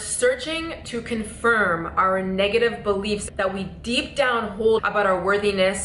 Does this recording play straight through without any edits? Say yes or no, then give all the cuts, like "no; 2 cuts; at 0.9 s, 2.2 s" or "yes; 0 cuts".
no; 1 cut; at 3.3 s